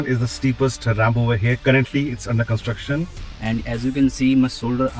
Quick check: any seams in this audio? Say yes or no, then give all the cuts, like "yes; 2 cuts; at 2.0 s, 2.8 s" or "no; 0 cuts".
yes; 1 cut; at 3.2 s